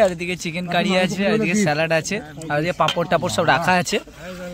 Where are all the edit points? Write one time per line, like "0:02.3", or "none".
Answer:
none